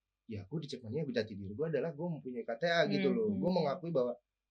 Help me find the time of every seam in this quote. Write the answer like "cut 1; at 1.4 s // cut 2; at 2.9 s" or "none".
none